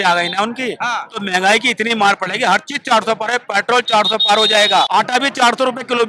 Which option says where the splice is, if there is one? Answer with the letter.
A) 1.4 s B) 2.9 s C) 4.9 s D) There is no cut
C